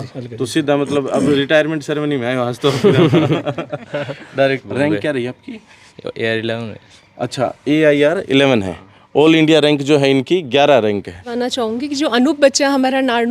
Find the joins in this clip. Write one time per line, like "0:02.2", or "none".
0:04.7
0:11.3